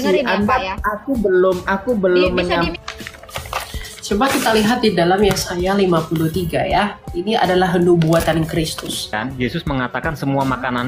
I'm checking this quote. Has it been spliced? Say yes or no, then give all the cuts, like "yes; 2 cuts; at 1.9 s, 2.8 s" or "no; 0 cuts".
yes; 3 cuts; at 2.7 s, 7.1 s, 9.2 s